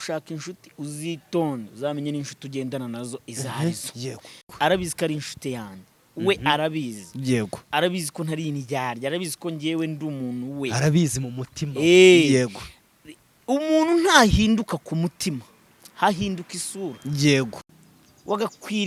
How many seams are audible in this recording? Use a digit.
2